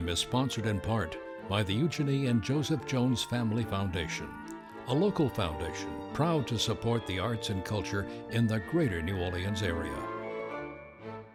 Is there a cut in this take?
no; 0 cuts

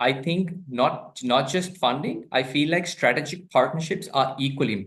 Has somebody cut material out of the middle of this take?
no; 0 cuts

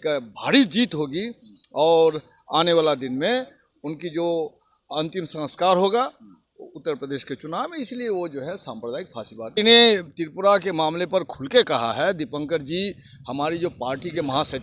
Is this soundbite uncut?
yes; 0 cuts

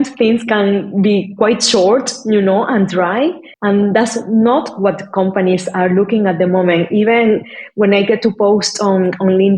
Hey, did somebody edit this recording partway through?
yes; 1 cut; at 3.5 s

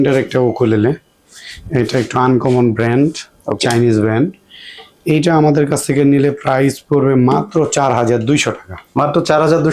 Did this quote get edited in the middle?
no; 0 cuts

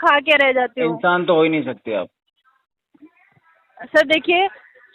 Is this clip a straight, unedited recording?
yes; 0 cuts

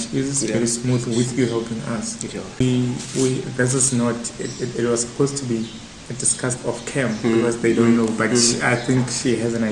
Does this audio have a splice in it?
yes; 1 cut; at 2.6 s

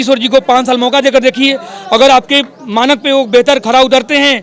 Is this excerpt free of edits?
yes; 0 cuts

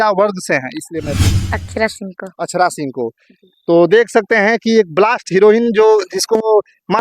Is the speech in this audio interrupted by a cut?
yes; 1 cut; at 1.3 s

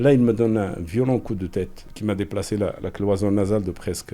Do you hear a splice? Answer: yes; 1 cut; at 1.9 s

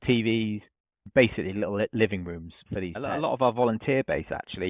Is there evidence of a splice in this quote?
yes; 1 cut; at 3.1 s

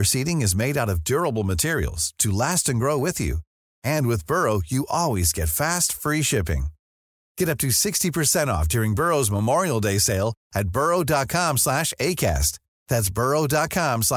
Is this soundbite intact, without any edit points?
yes; 0 cuts

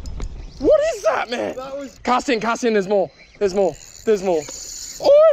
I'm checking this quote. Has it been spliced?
yes; 1 cut; at 1.9 s

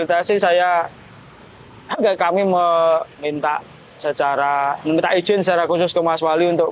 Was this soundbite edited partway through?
no; 0 cuts

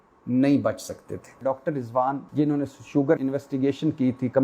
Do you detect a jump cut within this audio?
yes; 3 cuts; at 1.4 s, 2.2 s, 3.2 s

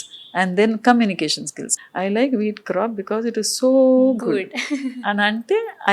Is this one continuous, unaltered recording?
no; 1 cut; at 1.6 s

